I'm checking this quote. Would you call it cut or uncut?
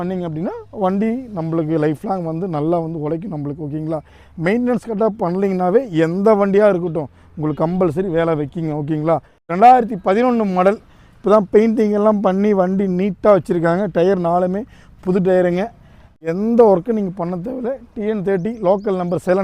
cut